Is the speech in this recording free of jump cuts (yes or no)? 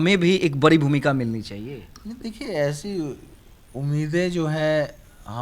yes